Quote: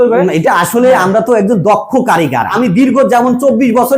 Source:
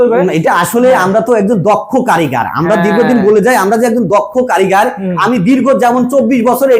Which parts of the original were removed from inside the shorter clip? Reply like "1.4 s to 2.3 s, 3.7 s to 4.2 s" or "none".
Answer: 2.5 s to 5.2 s

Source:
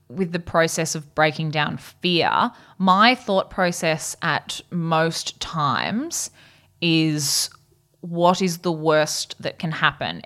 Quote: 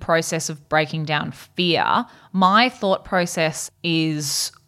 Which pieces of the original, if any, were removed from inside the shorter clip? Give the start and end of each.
4.1 s to 6.6 s

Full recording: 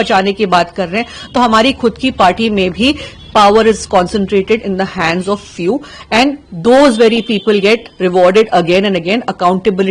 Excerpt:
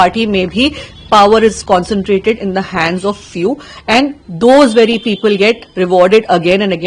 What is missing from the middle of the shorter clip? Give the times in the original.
none

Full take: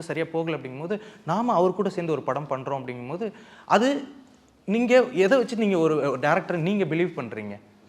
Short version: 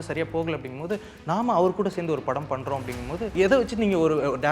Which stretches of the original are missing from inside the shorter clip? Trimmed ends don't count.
3.3 s to 5.1 s

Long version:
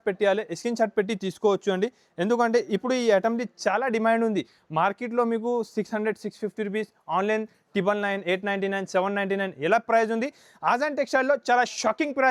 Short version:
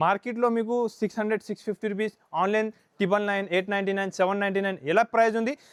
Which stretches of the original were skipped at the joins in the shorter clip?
none

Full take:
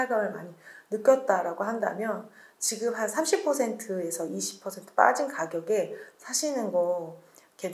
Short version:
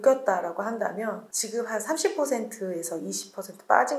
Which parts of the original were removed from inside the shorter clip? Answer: 2.3 s to 2.6 s

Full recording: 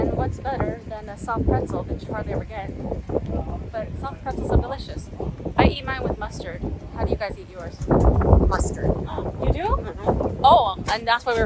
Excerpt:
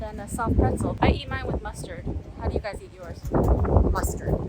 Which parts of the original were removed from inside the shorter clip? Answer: 1.9 s to 5.5 s

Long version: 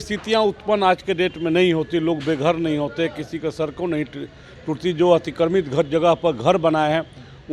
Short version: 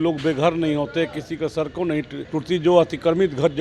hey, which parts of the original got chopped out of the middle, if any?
4.2 s to 4.5 s

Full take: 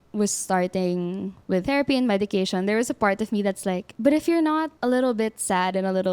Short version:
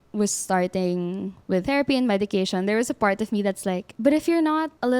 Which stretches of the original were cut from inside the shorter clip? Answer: none

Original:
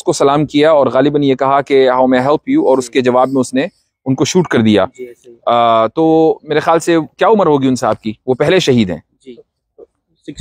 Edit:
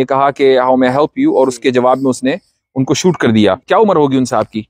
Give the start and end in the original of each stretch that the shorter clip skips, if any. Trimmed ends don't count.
4.9 s to 7.1 s

